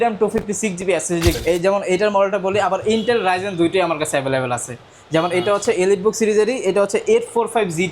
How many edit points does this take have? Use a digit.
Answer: 1